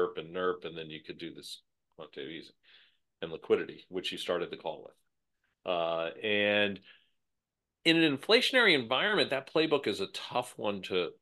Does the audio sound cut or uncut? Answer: uncut